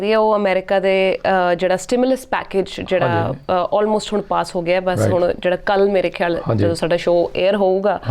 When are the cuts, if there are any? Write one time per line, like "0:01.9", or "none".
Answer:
none